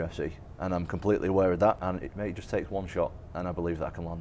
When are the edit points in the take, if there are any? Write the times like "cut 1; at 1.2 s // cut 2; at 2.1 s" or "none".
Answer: cut 1; at 1.9 s